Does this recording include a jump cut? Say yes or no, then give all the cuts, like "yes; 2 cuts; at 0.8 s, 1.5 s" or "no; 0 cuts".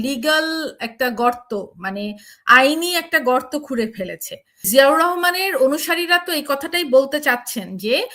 yes; 1 cut; at 4.6 s